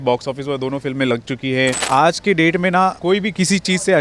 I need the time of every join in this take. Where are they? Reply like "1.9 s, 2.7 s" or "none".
1.8 s, 3.0 s